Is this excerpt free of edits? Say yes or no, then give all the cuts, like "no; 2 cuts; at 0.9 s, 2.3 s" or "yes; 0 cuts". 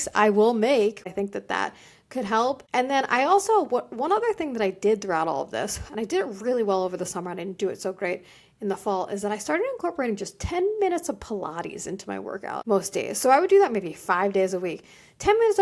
no; 3 cuts; at 1.1 s, 2.6 s, 12.6 s